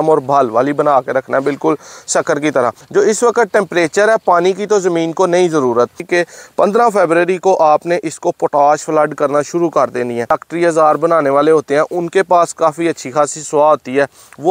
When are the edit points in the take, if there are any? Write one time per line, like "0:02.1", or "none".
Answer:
0:02.8
0:06.0
0:10.3

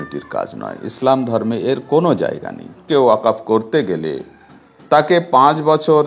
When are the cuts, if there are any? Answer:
0:02.8

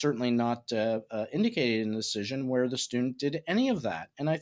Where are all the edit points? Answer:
none

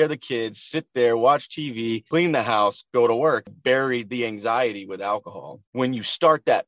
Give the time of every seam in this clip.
0:02.0
0:03.6
0:05.6

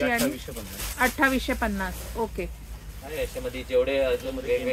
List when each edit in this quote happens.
none

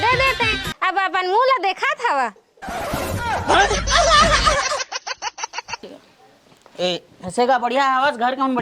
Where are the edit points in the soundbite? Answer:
0:06.0

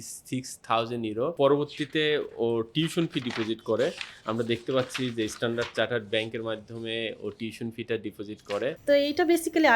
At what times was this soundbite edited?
0:01.3
0:08.8

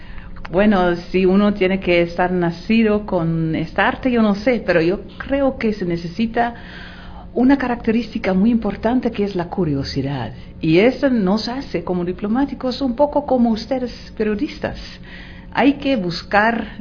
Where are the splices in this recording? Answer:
none

